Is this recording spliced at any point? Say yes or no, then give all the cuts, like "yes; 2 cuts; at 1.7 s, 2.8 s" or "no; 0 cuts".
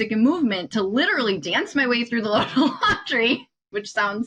no; 0 cuts